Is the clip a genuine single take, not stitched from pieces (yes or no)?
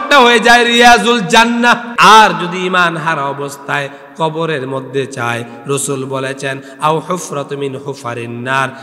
no